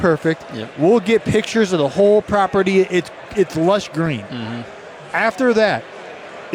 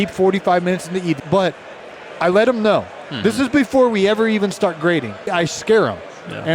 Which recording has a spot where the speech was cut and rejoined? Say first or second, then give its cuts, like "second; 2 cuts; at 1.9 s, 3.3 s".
second; 2 cuts; at 1.2 s, 5.3 s